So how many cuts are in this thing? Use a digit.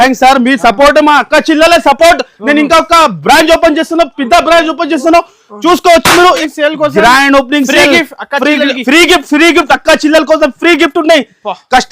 1